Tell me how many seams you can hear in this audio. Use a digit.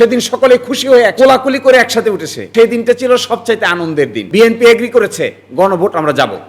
3